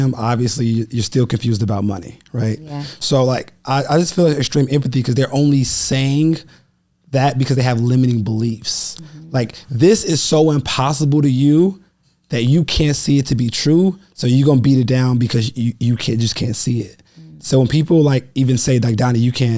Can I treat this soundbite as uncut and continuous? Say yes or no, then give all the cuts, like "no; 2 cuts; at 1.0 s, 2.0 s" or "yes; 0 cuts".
yes; 0 cuts